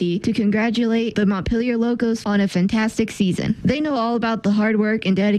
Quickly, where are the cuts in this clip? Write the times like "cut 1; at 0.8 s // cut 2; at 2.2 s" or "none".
none